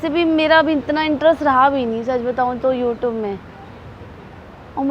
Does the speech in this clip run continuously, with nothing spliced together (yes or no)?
yes